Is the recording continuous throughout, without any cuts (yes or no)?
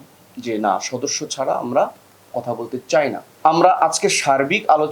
no